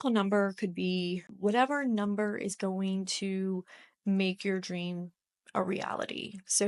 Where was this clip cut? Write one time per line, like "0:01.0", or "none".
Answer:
0:01.3